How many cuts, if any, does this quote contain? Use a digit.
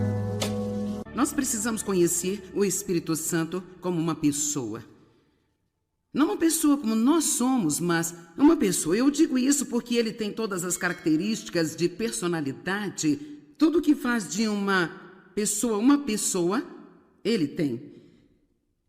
1